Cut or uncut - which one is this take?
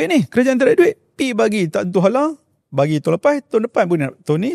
uncut